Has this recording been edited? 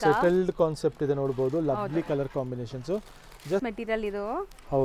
yes; 1 cut; at 3.6 s

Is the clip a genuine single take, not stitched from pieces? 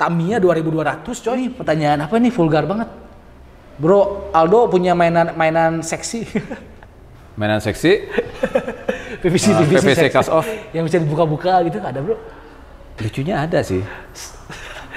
no; 1 cut; at 1.6 s

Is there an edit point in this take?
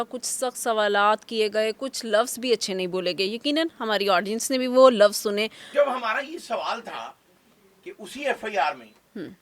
yes; 1 cut; at 5.6 s

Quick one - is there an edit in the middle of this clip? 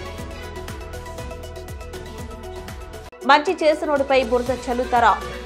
yes; 1 cut; at 2.6 s

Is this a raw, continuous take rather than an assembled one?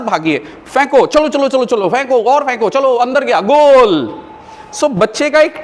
yes; 0 cuts

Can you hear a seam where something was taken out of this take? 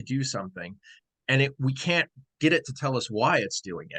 no; 0 cuts

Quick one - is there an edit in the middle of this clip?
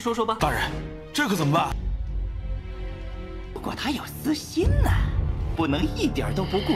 yes; 1 cut; at 3.7 s

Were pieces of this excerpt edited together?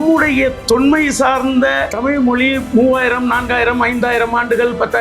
yes; 1 cut; at 1.9 s

